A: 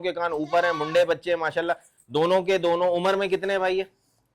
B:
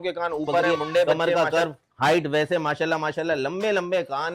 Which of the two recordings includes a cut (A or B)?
B